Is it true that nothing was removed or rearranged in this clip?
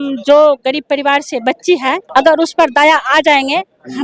no; 1 cut; at 2.0 s

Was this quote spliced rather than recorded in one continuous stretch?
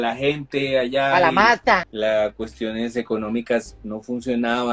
yes; 1 cut; at 1.9 s

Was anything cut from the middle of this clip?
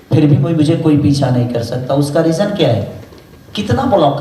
no; 0 cuts

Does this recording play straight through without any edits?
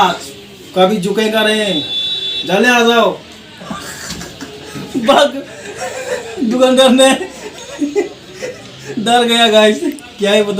no; 1 cut; at 3.7 s

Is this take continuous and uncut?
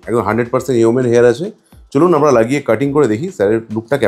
yes; 0 cuts

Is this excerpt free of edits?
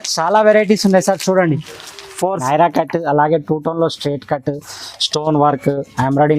no; 1 cut; at 2.4 s

